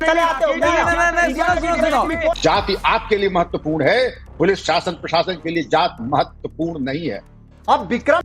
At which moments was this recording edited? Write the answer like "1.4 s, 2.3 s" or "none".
1.0 s, 2.4 s, 7.6 s